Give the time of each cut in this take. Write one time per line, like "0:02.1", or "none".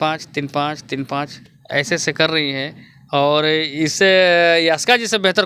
none

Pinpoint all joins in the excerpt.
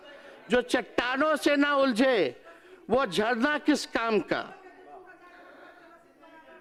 none

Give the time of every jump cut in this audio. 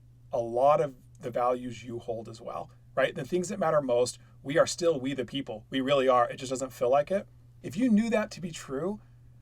0:07.6

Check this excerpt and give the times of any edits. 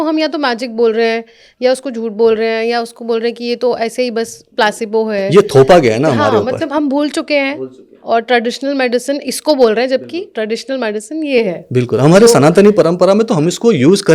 none

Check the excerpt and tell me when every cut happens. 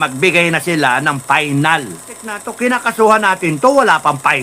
0:02.5

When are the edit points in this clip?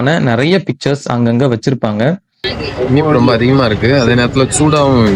0:02.6

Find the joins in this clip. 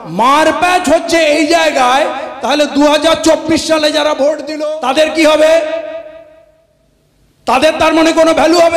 0:04.5

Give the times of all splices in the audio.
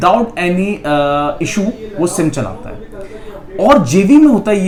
none

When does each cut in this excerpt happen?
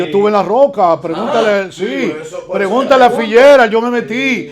none

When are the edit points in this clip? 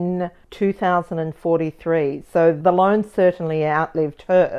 0:02.6

